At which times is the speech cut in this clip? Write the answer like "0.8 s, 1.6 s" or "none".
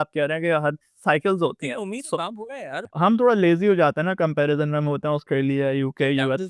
2.9 s